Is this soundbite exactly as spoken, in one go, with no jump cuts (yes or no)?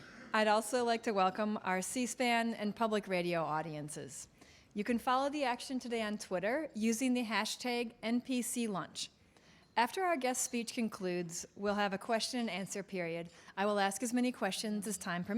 no